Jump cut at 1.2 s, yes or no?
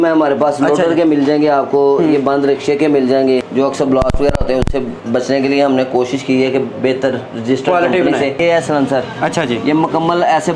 no